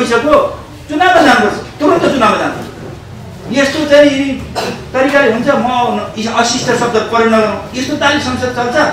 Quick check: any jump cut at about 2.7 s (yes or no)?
no